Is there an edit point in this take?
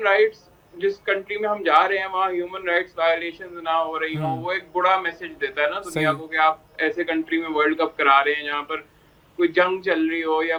no; 0 cuts

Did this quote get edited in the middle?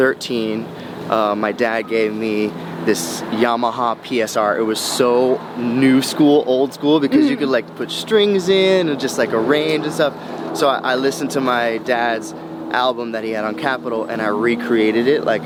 no; 0 cuts

